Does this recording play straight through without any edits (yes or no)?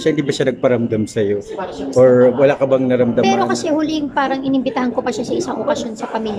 yes